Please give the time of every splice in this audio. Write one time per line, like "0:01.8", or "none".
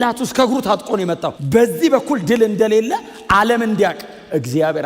0:01.3